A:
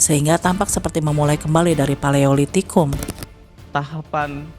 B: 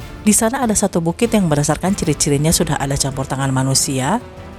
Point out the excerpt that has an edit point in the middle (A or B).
A